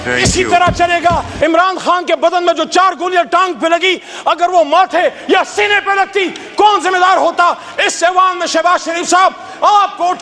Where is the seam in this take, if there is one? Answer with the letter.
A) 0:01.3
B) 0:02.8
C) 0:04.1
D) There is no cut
A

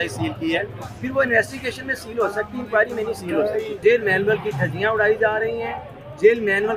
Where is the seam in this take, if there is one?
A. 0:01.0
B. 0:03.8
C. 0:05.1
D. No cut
B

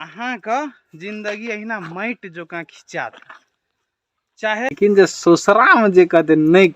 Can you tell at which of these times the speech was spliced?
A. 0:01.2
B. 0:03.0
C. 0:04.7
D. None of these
C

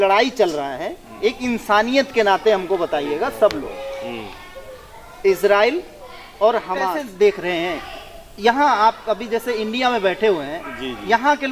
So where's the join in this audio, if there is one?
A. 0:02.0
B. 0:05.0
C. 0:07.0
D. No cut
C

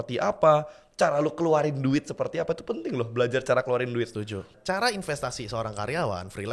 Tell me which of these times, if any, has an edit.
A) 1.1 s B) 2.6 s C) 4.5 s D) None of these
C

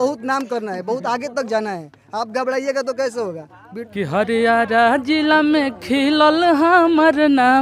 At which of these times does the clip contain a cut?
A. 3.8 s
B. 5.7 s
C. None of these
A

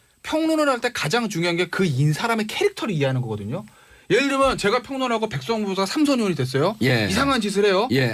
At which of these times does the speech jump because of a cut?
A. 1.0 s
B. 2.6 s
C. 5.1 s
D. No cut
D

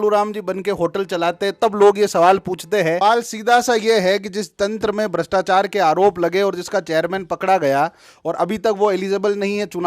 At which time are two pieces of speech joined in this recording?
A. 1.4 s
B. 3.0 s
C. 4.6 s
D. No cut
B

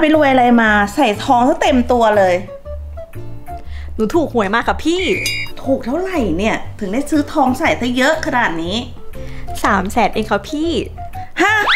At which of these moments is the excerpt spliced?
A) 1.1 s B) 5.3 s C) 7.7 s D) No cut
B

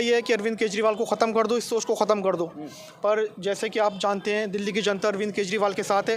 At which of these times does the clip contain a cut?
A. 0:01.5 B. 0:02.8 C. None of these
C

